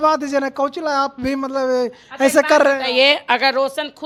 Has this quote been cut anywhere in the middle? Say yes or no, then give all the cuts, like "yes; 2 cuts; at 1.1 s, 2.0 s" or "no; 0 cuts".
no; 0 cuts